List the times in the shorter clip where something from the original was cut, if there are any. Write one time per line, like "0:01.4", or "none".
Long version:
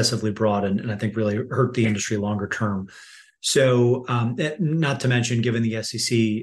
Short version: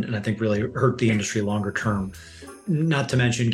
0:02.6